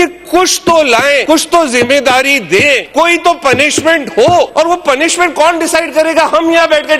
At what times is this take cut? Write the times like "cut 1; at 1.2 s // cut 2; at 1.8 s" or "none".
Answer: cut 1; at 1.2 s // cut 2; at 2.9 s // cut 3; at 4.5 s